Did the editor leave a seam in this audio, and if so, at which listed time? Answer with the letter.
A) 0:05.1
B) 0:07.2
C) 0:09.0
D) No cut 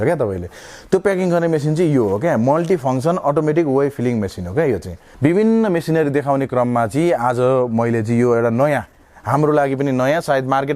A